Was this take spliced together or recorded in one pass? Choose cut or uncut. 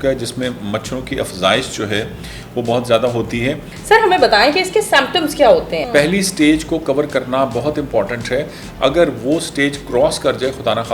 cut